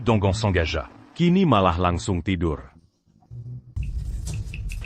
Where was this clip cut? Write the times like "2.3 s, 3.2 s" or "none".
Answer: 3.8 s